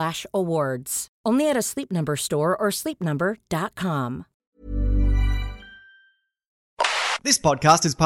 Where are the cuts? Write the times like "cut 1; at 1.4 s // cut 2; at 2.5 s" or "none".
cut 1; at 4.5 s // cut 2; at 6.8 s